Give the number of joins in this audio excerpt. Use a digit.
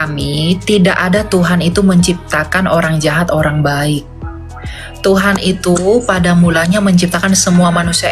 0